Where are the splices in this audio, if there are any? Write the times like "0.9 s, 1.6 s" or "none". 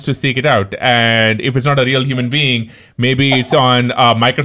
none